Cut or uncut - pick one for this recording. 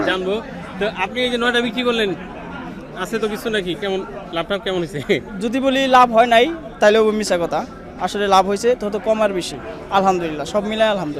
uncut